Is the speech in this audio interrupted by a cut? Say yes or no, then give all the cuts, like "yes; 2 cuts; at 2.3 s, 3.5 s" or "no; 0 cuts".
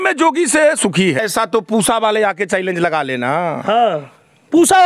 yes; 1 cut; at 1.2 s